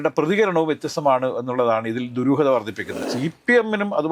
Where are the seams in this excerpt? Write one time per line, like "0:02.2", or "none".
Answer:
0:03.0